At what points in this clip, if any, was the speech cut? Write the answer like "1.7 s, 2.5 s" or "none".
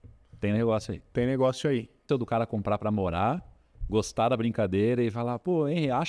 2.0 s